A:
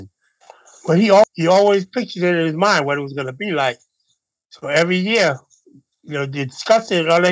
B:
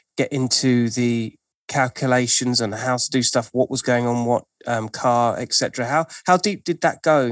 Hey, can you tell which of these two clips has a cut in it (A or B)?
A